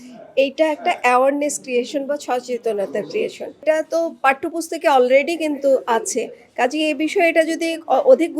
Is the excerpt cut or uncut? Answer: cut